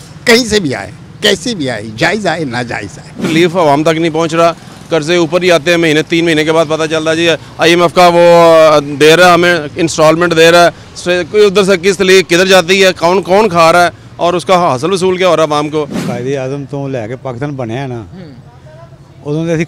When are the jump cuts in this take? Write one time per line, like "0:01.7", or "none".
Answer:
0:03.3
0:16.0